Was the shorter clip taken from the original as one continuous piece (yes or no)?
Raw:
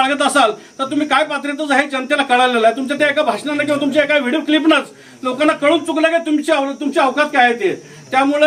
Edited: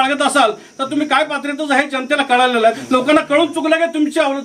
no